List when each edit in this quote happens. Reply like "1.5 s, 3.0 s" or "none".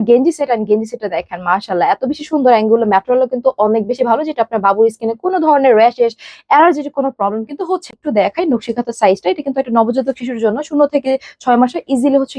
8.0 s